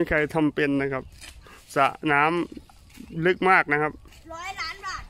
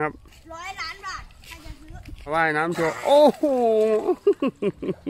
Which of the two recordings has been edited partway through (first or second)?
second